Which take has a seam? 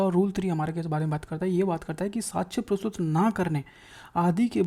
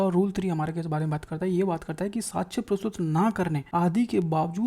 second; 1 cut; at 3.6 s

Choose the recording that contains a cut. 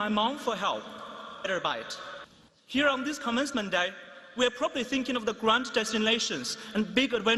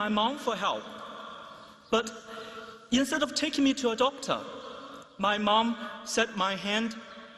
second; 1 cut; at 1.4 s

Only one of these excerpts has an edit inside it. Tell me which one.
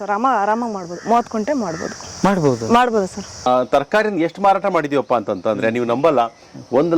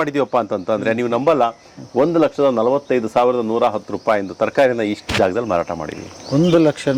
first; 1 cut; at 3.5 s

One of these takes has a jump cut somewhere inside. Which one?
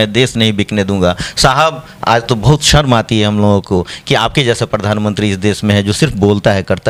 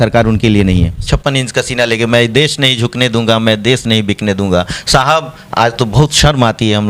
second; 1 cut; at 1.0 s

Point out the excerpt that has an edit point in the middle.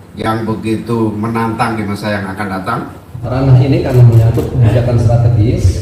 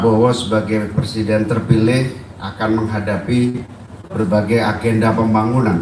first; 1 cut; at 3.2 s

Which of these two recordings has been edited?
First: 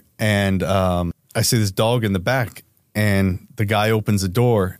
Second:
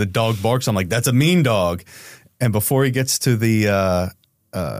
first; 1 cut; at 1.2 s

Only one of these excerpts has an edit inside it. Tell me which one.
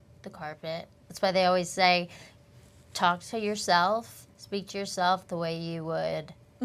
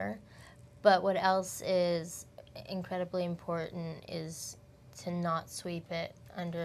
first; 1 cut; at 1.0 s

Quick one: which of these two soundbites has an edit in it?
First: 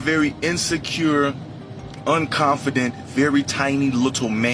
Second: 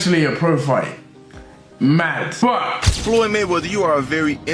second; 1 cut; at 2.9 s

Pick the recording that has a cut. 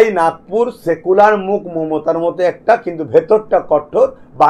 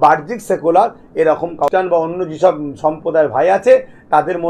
second; 1 cut; at 1.7 s

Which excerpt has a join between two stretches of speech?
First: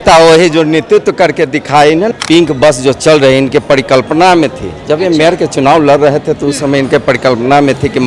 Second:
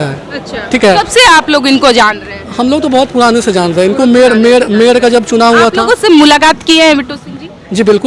first; 1 cut; at 2.1 s

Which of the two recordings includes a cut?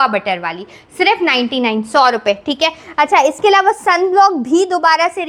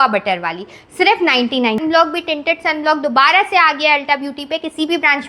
second; 1 cut; at 1.8 s

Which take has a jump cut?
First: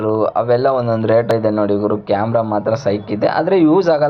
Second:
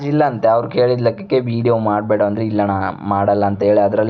first; 1 cut; at 1.3 s

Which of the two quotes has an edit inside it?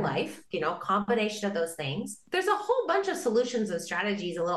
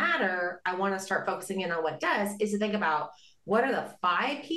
first; 1 cut; at 2.1 s

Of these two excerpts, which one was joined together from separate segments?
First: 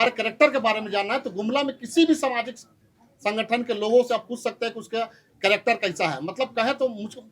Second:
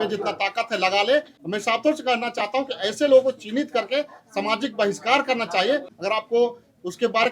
second; 2 cuts; at 1.4 s, 5.9 s

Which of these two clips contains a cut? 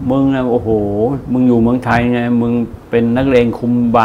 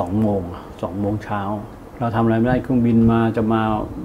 second; 1 cut; at 1.8 s

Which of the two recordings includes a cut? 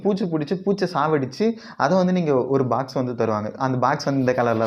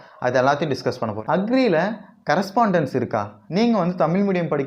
second; 2 cuts; at 1.2 s, 3.4 s

